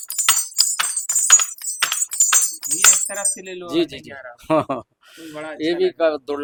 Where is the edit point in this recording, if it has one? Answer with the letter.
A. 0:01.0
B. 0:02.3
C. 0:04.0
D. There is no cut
D